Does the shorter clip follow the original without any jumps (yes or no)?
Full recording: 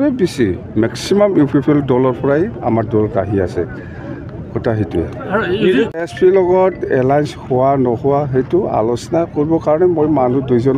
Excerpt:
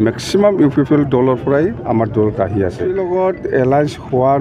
no